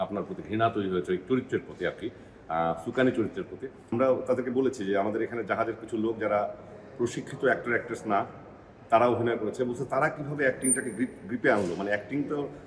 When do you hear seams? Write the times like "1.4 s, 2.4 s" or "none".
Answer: 3.9 s